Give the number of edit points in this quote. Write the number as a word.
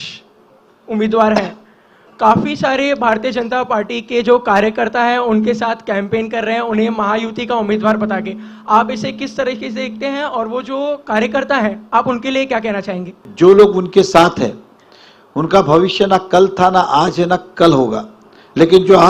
one